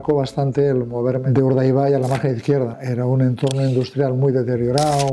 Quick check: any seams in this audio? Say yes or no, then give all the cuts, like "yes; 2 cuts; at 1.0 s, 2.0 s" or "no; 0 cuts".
yes; 2 cuts; at 1.2 s, 2.8 s